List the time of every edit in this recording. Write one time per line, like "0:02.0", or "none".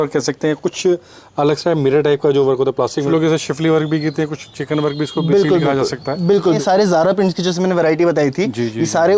0:03.1
0:06.6